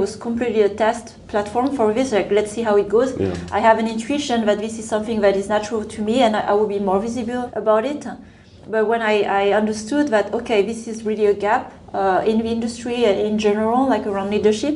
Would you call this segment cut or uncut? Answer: cut